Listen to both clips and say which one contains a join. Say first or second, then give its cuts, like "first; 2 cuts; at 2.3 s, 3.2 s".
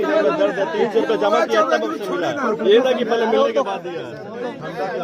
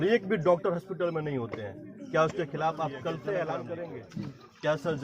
second; 1 cut; at 4.0 s